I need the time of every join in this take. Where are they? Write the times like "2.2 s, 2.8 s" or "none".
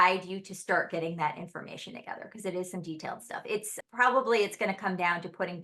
none